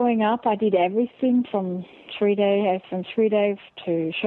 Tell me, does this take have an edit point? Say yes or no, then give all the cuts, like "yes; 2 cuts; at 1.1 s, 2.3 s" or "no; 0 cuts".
no; 0 cuts